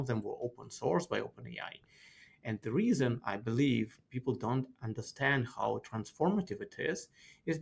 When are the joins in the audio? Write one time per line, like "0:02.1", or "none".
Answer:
none